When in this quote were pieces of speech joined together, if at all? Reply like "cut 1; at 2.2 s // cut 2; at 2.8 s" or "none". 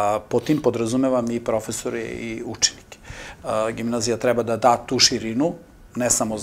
none